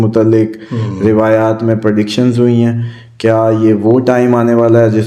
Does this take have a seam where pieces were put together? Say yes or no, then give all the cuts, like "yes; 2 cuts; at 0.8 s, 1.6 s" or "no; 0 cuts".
no; 0 cuts